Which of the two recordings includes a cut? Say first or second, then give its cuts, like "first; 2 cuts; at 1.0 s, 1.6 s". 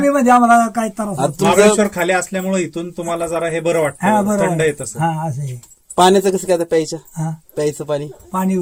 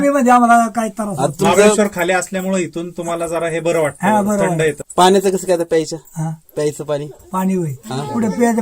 second; 1 cut; at 4.8 s